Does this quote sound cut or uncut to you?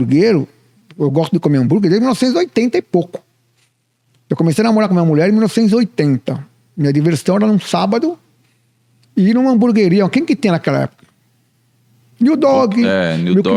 uncut